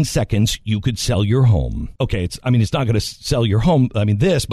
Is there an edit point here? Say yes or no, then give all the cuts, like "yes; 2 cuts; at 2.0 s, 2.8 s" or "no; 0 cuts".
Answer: yes; 1 cut; at 1.8 s